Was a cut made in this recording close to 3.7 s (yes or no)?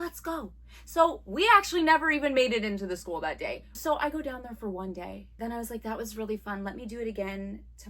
yes